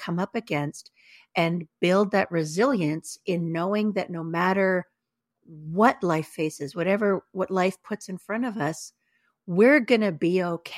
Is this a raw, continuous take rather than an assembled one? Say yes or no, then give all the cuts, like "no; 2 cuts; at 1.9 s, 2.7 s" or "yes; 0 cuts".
yes; 0 cuts